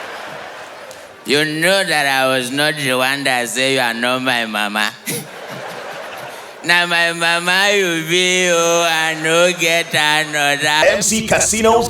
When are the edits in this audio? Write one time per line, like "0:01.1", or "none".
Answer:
0:10.8